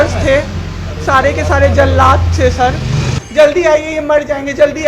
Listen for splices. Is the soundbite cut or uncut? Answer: cut